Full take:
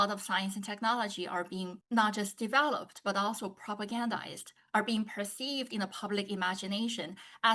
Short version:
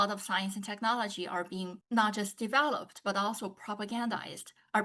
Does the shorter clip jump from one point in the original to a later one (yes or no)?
no